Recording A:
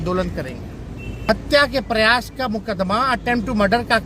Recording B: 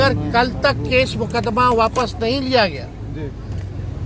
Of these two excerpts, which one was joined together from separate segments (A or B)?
A